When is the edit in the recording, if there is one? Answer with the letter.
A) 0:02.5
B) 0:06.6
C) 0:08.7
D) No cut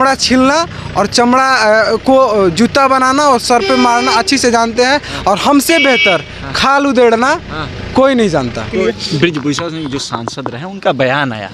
C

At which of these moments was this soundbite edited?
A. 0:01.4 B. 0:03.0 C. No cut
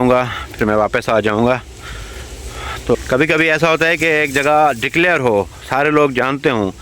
B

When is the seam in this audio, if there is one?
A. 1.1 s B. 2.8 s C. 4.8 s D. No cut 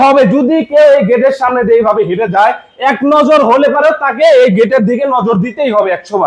D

